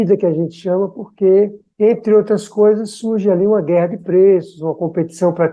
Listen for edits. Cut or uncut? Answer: uncut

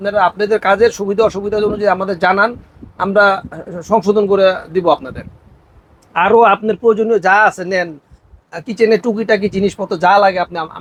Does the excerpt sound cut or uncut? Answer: uncut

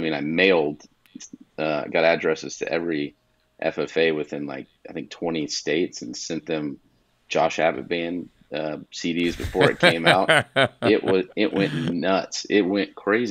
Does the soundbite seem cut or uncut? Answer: uncut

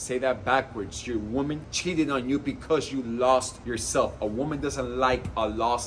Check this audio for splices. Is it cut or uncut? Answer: cut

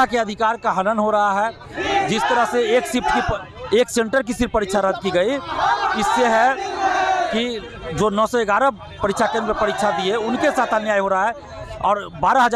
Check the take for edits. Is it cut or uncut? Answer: uncut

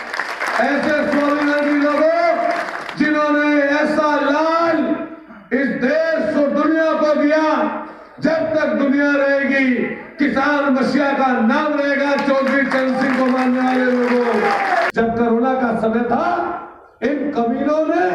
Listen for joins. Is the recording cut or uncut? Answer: cut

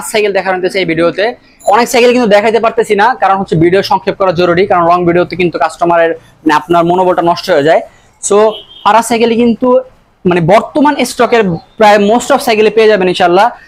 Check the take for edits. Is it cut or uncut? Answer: cut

